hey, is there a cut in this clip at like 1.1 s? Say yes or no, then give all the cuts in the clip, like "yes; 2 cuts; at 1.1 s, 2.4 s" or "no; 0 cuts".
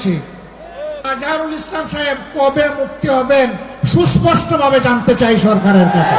yes; 1 cut; at 1.1 s